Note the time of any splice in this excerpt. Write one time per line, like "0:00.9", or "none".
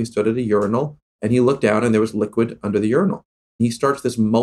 0:01.1
0:03.5